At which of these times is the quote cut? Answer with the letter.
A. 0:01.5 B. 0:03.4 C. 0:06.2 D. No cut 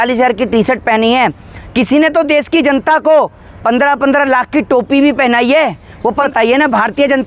C